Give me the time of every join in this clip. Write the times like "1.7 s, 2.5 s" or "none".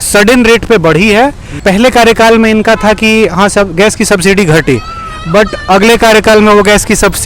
1.5 s